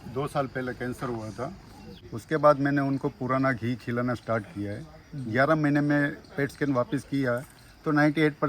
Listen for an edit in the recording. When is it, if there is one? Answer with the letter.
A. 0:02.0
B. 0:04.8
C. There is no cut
A